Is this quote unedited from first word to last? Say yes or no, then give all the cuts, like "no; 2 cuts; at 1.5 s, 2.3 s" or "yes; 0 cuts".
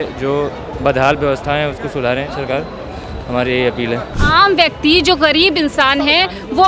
no; 1 cut; at 4.2 s